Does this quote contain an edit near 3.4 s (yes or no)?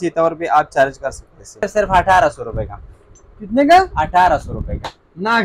no